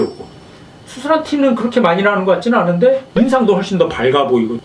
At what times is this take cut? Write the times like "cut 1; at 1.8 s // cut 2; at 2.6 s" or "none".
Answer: cut 1; at 3.1 s

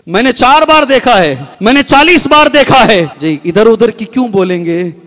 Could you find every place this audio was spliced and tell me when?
cut 1; at 1.5 s // cut 2; at 3.2 s

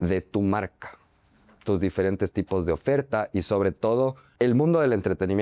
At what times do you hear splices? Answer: cut 1; at 4.3 s

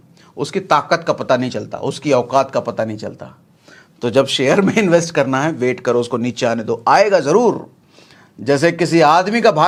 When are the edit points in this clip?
none

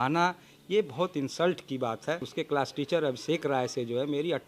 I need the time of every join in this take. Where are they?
cut 1; at 2.3 s

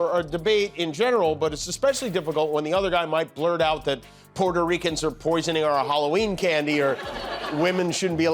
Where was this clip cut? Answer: cut 1; at 6.9 s

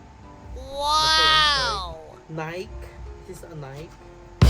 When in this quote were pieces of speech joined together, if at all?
cut 1; at 2.1 s

